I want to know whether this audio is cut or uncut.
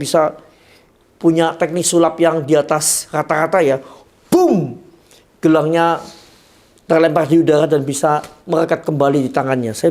uncut